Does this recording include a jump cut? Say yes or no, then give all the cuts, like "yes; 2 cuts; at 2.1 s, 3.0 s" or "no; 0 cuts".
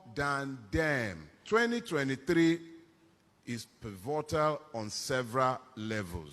yes; 1 cut; at 1.3 s